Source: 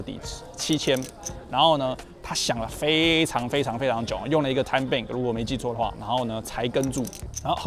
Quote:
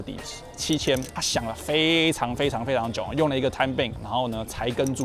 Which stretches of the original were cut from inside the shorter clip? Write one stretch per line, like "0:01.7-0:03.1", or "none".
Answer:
0:01.2-0:02.3
0:05.1-0:05.9